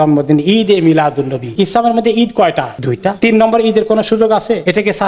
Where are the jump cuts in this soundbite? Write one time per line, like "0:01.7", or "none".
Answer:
none